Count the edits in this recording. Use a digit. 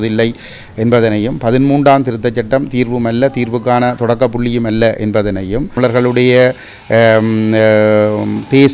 1